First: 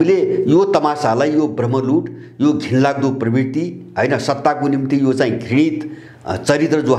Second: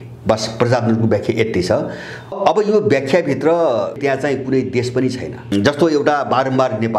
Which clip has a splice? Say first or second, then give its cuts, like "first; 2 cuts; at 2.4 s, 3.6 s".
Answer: second; 3 cuts; at 2.3 s, 4.0 s, 5.5 s